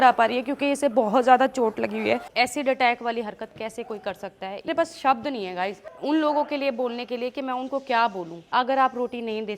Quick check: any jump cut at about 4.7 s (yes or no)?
yes